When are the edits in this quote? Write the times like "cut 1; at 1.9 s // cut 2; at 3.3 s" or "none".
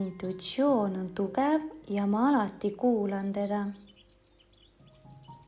none